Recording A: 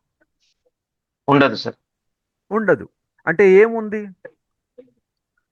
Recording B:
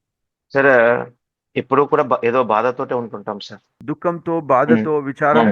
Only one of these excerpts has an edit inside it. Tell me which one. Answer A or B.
B